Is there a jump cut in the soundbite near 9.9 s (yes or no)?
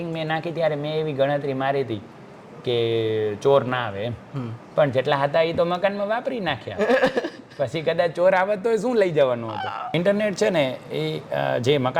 yes